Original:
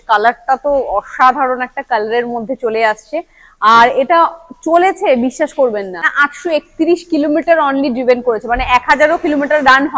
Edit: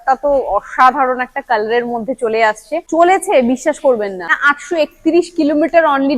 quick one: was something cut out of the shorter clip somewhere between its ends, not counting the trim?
yes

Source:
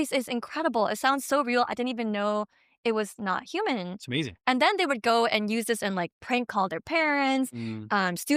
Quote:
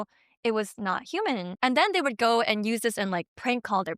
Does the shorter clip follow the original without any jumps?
no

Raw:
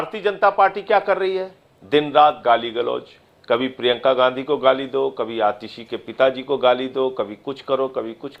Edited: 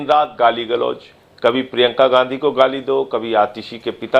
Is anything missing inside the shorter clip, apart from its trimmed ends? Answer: no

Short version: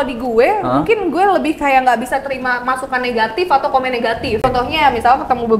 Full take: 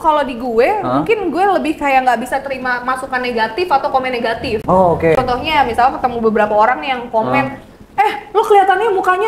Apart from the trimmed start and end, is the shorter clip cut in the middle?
yes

